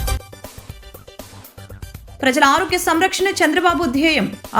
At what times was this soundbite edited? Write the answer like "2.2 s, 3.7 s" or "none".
2.2 s